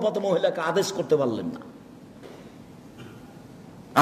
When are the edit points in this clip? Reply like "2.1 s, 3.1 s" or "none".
none